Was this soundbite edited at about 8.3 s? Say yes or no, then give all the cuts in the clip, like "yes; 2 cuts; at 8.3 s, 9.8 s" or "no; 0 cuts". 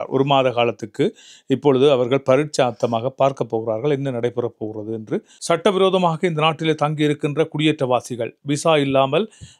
no; 1 cut; at 5.3 s